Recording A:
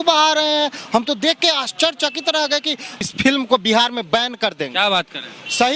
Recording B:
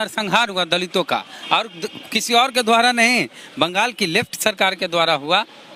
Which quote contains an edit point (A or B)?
A